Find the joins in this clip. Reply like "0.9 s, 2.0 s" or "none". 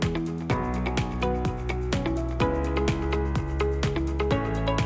none